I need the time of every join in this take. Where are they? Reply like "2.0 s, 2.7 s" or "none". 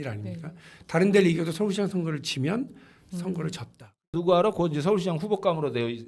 4.1 s